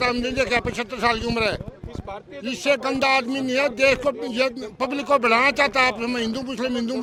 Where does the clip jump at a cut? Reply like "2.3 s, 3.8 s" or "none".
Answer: none